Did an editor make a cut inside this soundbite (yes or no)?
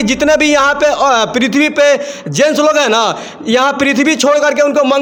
no